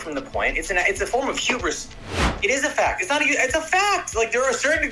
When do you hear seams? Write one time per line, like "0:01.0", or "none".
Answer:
0:02.1